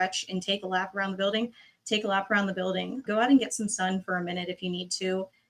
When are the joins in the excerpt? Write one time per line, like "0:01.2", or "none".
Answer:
0:03.0